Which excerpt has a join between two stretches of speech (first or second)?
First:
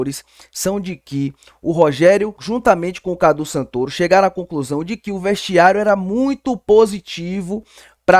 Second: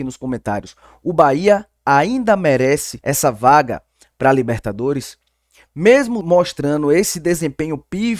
second